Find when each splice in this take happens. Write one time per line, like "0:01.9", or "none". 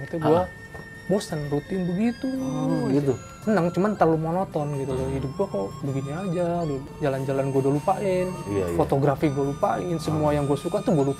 0:03.3
0:06.9